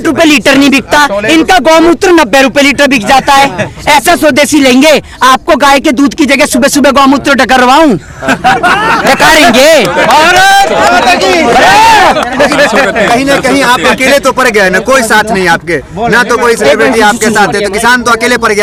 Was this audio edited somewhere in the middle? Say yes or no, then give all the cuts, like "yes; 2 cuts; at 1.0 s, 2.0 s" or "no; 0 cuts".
no; 0 cuts